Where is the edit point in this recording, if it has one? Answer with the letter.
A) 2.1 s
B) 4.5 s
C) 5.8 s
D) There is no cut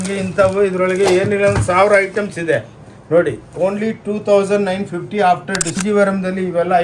C